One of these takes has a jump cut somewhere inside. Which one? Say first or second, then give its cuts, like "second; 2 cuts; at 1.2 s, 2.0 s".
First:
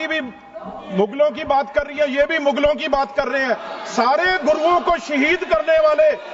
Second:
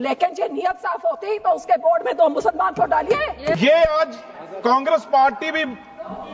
second; 1 cut; at 3.6 s